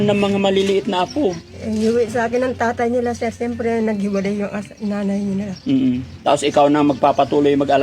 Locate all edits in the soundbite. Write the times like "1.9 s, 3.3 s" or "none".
none